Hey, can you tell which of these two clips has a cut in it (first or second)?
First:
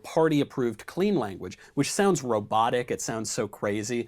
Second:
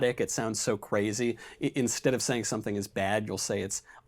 second